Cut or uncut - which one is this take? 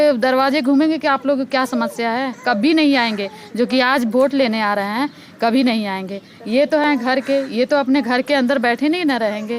uncut